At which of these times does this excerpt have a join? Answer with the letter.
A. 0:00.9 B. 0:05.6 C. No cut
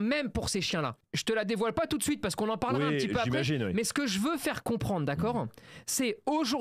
A